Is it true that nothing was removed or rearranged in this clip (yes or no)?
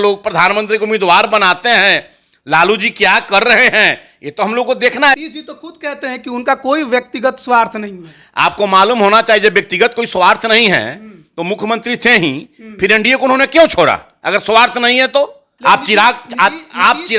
no